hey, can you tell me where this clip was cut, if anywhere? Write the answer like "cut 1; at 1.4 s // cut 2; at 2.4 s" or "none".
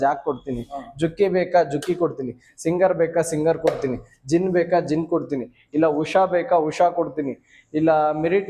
none